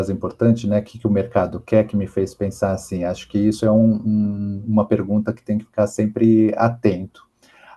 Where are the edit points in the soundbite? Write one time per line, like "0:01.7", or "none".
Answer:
none